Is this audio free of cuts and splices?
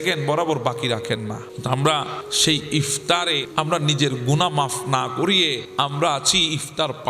no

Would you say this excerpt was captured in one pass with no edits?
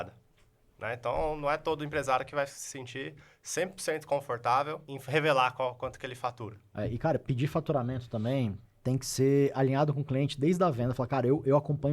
no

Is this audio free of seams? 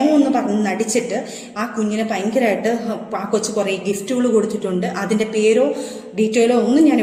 yes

